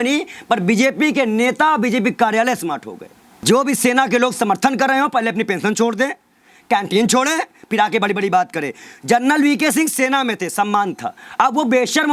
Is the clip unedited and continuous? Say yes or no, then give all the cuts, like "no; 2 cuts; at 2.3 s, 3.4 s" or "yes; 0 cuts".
no; 1 cut; at 3.4 s